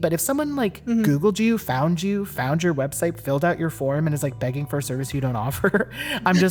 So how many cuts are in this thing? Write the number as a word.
zero